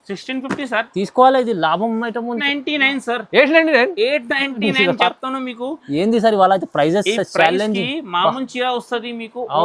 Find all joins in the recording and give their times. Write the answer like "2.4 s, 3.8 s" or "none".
2.4 s